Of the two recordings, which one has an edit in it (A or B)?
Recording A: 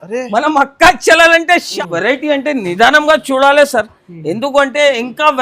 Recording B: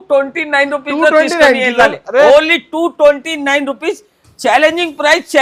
A